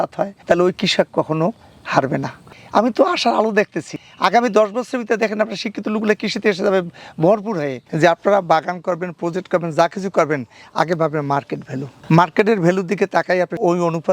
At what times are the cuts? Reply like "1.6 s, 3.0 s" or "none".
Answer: 2.5 s, 7.8 s